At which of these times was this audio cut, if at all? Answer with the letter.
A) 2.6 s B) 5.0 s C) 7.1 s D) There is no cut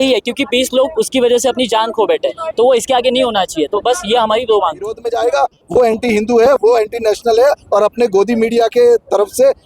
B